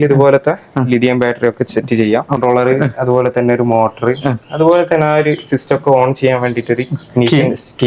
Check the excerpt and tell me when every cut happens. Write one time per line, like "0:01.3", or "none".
0:02.4